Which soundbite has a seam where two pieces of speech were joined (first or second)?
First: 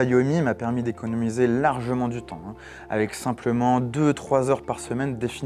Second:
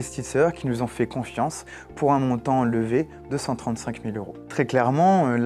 second